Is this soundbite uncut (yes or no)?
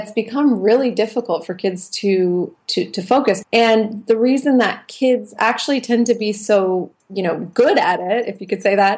no